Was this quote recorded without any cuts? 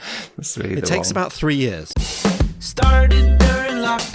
no; 1 cut; at 1.9 s

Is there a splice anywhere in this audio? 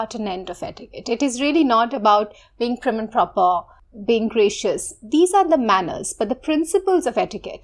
yes; 1 cut; at 3.8 s

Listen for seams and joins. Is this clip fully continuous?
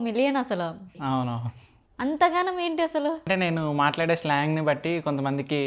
no; 2 cuts; at 0.9 s, 3.3 s

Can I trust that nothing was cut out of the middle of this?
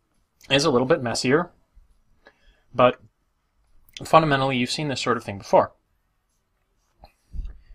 no; 1 cut; at 2.7 s

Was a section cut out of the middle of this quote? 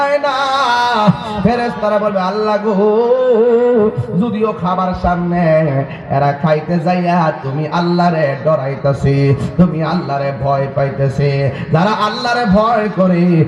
no; 0 cuts

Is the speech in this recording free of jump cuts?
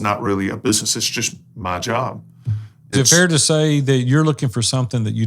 no; 1 cut; at 2.9 s

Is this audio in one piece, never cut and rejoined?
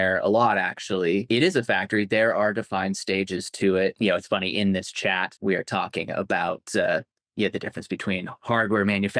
no; 3 cuts; at 1.2 s, 4.0 s, 5.3 s

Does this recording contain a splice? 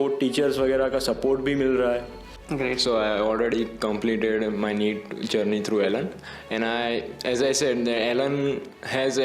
yes; 1 cut; at 2.4 s

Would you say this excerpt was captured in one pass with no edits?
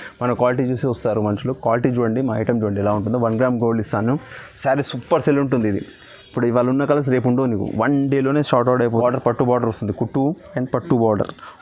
no; 1 cut; at 8.9 s

